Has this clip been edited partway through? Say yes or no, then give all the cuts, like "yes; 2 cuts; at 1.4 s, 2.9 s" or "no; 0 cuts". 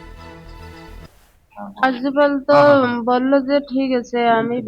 yes; 1 cut; at 0.9 s